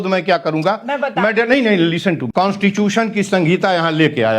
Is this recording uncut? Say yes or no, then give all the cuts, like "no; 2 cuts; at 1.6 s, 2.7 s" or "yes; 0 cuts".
no; 1 cut; at 2.2 s